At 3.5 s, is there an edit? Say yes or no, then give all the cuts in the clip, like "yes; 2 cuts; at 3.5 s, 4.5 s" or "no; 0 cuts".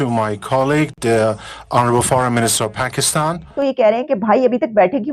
yes; 1 cut; at 3.5 s